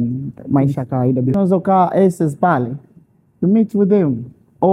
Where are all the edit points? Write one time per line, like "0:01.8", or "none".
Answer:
0:01.3